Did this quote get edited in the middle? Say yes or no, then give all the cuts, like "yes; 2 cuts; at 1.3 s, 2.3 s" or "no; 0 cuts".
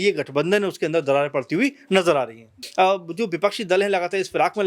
yes; 1 cut; at 2.6 s